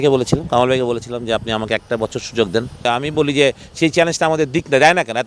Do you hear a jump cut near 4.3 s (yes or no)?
no